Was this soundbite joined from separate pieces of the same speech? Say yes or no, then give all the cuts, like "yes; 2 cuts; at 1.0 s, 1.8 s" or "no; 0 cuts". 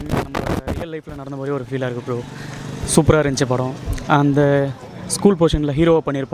no; 0 cuts